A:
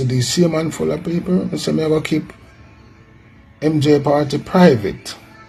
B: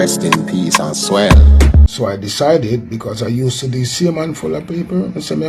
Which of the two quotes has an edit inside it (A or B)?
B